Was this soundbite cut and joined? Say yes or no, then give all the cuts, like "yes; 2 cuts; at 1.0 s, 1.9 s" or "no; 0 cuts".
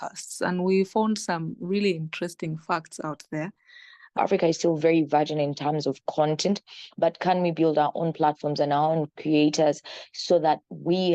yes; 1 cut; at 4.2 s